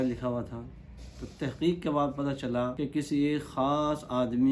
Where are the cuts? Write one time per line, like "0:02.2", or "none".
0:02.7